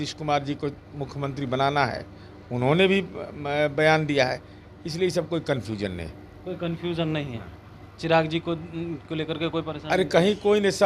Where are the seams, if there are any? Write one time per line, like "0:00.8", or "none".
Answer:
none